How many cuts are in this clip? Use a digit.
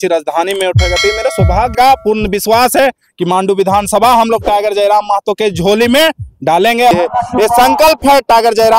2